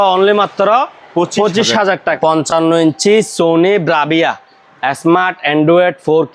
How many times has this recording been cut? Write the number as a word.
one